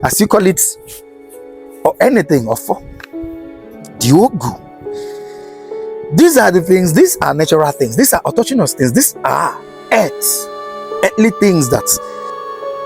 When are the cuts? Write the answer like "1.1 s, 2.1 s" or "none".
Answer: 11.9 s